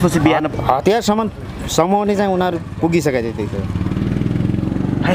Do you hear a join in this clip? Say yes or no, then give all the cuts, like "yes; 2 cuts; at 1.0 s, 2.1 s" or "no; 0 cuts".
no; 0 cuts